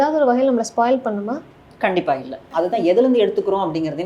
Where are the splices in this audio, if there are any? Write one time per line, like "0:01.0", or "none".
0:02.4